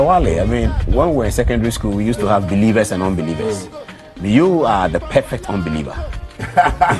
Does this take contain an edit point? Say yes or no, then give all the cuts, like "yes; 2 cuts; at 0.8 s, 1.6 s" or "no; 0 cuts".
no; 0 cuts